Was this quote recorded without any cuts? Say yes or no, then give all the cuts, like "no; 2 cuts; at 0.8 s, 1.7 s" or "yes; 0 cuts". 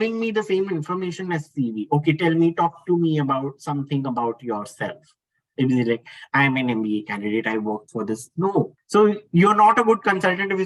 no; 1 cut; at 8.8 s